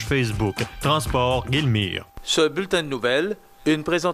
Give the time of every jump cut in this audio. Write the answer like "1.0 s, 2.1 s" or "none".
2.0 s